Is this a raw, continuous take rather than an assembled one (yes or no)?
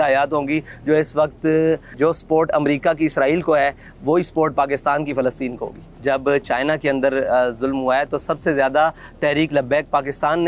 no